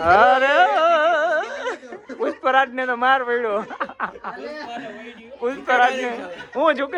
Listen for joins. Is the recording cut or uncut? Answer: uncut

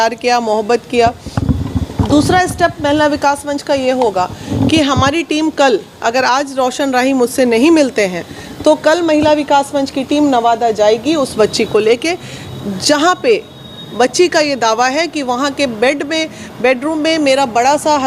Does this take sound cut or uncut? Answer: uncut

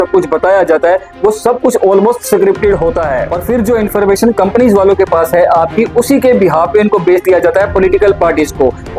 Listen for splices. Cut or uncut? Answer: cut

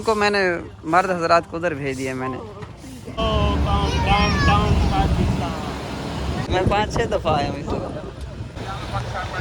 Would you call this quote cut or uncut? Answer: cut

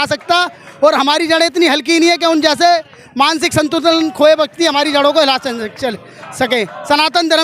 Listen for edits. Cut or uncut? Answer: uncut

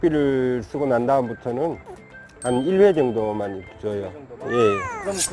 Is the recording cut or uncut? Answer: uncut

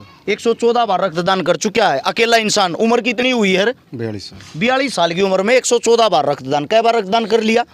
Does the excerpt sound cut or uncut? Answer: uncut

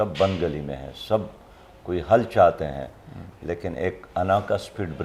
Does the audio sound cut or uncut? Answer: uncut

